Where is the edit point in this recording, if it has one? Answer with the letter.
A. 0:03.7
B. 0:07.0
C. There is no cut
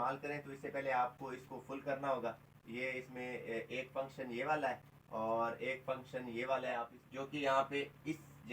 B